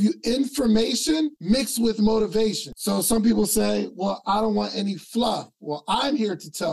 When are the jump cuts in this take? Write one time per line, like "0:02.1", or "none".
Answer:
0:01.4
0:02.7

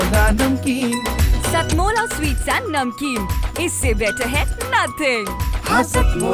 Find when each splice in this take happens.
none

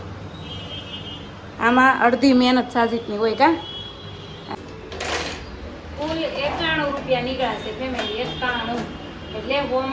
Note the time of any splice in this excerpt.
0:04.5

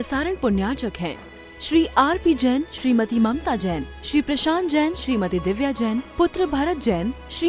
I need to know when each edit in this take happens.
none

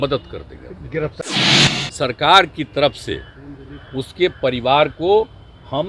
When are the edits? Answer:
0:01.4

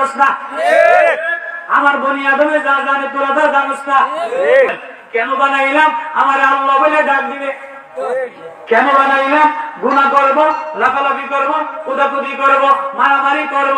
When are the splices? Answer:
0:04.7

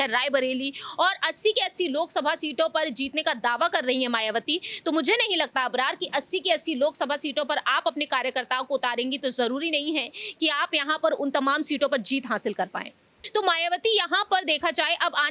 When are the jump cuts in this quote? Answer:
0:13.2

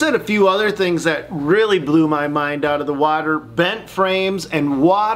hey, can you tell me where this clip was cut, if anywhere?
none

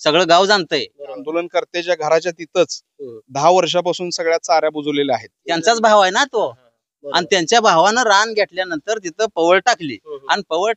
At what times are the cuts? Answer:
0:01.2
0:05.4

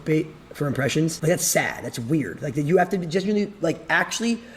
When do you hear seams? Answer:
0:01.2

